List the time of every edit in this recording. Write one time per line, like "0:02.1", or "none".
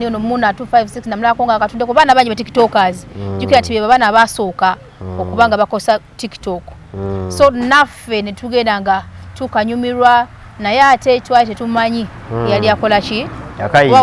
none